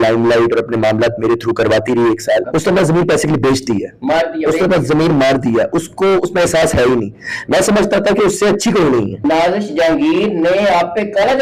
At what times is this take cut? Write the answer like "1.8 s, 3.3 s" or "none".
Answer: 2.5 s, 9.2 s